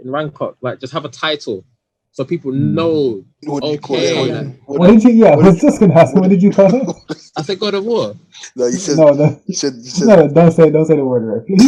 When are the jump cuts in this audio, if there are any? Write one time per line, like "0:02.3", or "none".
none